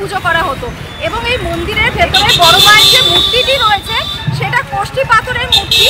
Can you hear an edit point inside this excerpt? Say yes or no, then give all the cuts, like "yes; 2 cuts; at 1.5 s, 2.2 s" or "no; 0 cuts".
no; 0 cuts